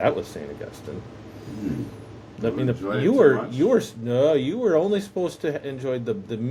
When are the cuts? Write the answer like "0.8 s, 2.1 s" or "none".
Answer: none